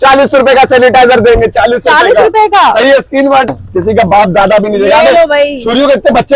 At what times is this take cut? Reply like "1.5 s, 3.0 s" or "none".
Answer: 3.5 s